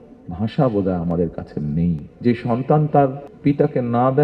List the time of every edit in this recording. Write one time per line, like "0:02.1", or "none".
0:02.1
0:03.3